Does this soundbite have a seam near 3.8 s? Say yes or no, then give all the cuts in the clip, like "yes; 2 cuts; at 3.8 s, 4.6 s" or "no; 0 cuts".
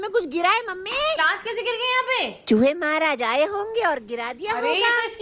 no; 1 cut; at 1.2 s